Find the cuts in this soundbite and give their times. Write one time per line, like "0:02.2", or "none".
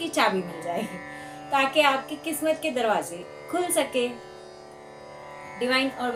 none